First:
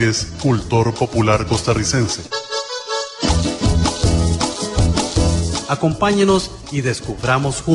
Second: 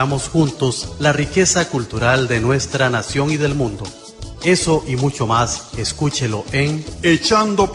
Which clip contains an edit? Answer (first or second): first